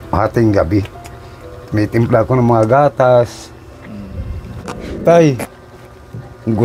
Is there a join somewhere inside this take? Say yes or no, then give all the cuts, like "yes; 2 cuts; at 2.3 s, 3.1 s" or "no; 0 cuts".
yes; 1 cut; at 4.7 s